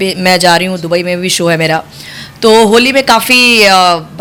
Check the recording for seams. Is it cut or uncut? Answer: uncut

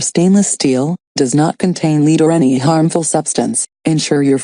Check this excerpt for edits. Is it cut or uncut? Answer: cut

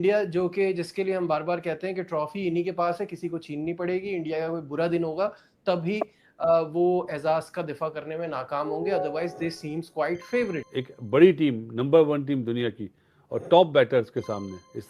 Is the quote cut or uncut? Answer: cut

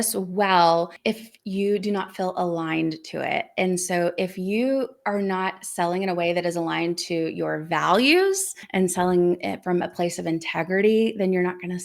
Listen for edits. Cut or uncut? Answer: cut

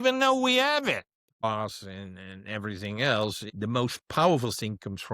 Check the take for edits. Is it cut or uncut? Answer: cut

